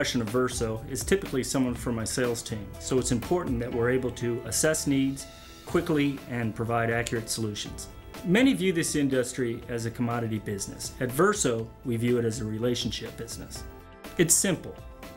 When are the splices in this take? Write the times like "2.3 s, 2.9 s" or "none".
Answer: none